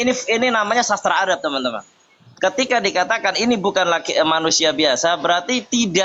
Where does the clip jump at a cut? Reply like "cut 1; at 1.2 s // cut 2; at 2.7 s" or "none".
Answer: none